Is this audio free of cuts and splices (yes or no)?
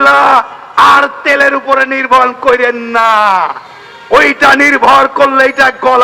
yes